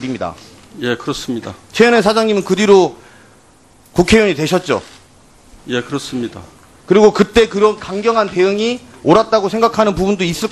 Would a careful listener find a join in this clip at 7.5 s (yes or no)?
yes